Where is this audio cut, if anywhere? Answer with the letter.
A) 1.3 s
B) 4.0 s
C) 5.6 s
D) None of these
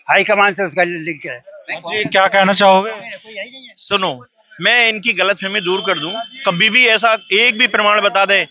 D